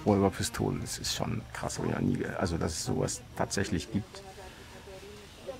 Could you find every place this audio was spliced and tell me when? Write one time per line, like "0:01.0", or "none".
none